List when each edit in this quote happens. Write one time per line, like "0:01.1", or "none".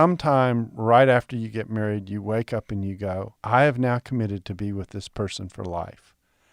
0:03.3